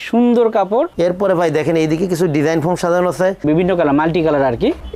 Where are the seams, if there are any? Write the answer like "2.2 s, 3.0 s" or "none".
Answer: 0.9 s, 3.4 s